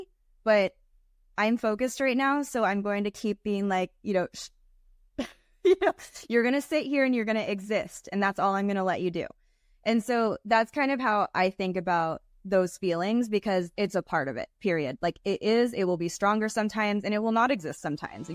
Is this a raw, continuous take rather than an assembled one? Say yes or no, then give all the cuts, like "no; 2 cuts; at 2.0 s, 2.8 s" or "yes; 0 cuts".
yes; 0 cuts